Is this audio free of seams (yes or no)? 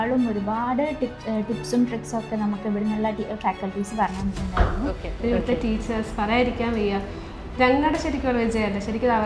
no